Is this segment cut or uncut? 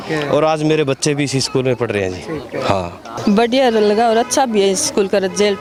uncut